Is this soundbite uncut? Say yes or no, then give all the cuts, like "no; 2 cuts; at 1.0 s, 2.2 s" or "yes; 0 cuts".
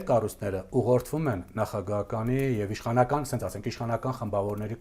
yes; 0 cuts